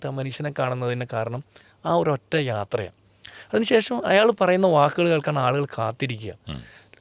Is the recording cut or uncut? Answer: uncut